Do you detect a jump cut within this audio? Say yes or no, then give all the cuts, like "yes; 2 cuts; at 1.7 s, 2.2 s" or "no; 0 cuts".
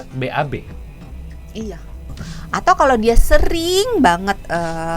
yes; 1 cut; at 2.2 s